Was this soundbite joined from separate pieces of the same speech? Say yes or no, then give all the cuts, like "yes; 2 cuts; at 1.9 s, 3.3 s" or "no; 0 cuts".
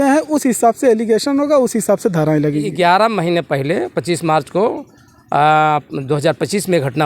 yes; 1 cut; at 2.7 s